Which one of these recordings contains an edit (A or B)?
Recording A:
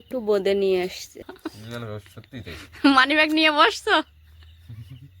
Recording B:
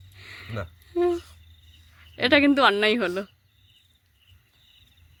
A